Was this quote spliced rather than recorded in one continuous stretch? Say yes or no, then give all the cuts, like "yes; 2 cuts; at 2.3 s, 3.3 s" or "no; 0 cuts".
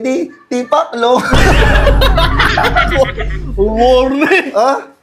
no; 0 cuts